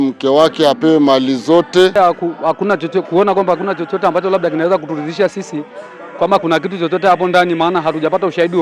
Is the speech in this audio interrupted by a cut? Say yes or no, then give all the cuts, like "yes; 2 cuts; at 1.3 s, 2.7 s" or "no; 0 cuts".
yes; 1 cut; at 1.9 s